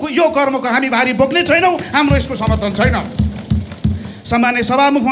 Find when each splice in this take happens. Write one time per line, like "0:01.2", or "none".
none